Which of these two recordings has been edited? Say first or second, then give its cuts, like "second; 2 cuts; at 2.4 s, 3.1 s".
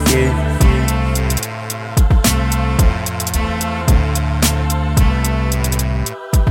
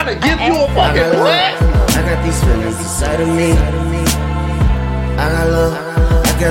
second; 1 cut; at 1.5 s